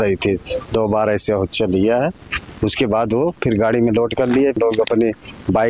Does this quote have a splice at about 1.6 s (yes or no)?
no